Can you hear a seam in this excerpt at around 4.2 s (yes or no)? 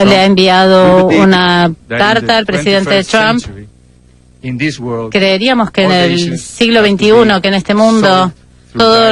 no